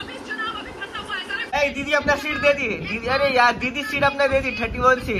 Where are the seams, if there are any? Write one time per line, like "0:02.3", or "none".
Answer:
0:01.5